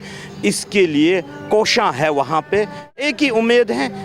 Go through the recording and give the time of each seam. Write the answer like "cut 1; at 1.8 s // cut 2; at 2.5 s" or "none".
cut 1; at 3.0 s